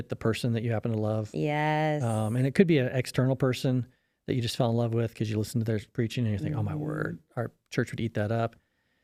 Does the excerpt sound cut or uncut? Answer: uncut